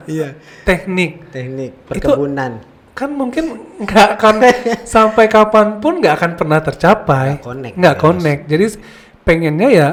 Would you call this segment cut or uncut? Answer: uncut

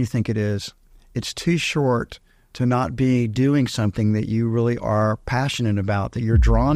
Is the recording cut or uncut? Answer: uncut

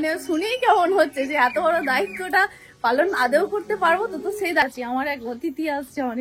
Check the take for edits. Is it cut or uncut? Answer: cut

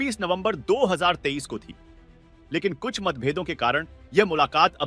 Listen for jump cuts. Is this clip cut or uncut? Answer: uncut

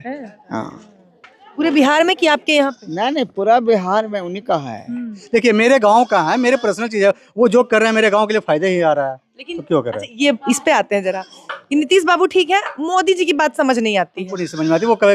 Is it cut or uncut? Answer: cut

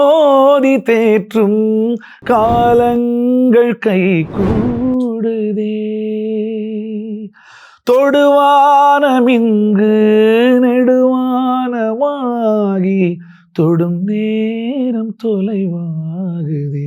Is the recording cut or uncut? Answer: uncut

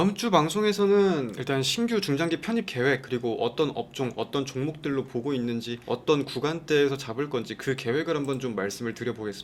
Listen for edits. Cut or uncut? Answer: uncut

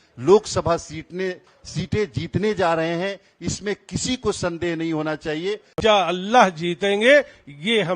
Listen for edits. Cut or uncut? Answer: cut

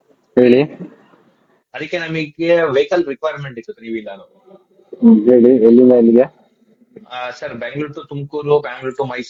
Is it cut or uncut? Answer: uncut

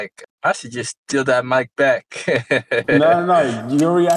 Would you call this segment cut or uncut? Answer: uncut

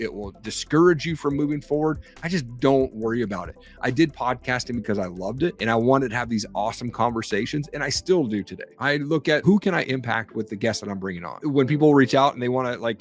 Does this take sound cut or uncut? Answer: cut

